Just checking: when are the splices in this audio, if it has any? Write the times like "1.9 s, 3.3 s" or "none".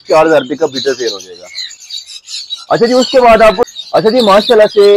none